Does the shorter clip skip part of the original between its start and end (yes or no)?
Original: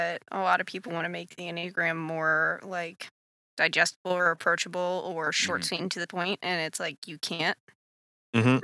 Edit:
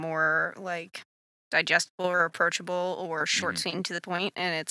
no